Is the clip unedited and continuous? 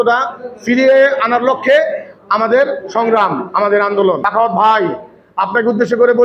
no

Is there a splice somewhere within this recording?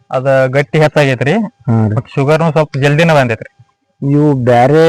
no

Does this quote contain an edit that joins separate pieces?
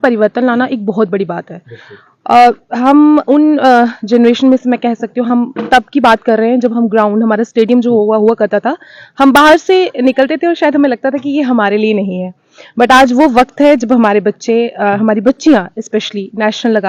no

